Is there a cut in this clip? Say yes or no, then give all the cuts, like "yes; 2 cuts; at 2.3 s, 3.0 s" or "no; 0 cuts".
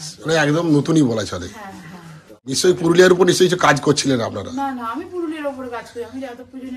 yes; 1 cut; at 2.6 s